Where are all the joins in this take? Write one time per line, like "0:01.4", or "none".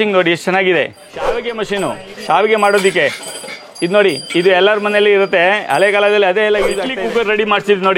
0:01.3
0:06.9

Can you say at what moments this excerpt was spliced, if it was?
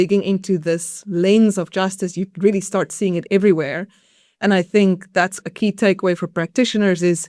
0:03.2

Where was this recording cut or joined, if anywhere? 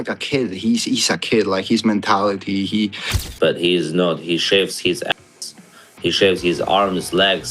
0:03.2

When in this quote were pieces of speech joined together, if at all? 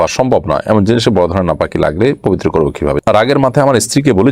0:03.0

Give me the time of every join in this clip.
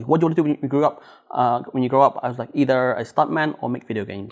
none

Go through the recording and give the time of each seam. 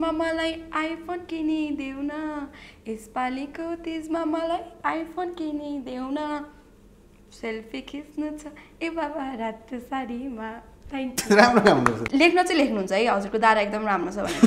0:12.0

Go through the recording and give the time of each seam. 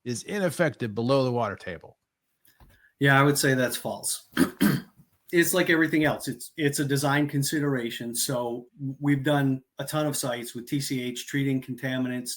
0:05.2

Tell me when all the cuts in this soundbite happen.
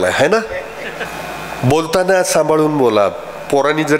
0:01.0

